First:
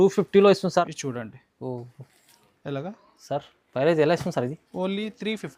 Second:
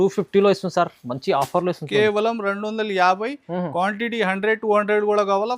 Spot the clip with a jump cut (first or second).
first